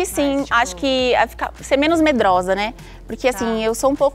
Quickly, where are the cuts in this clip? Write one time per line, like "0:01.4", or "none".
none